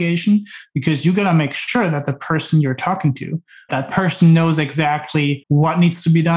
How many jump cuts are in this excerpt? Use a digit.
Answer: 2